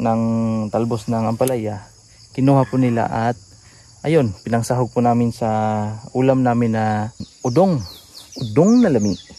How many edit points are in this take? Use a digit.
1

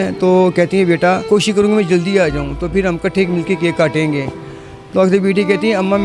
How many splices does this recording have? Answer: 1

